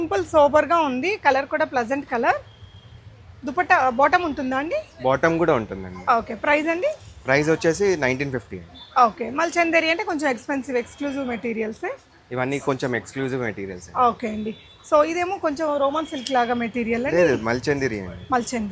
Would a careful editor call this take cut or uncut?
uncut